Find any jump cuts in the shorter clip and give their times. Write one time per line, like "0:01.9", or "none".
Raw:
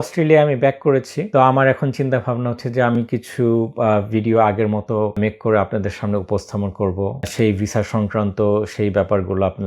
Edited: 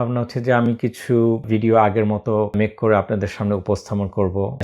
0:01.4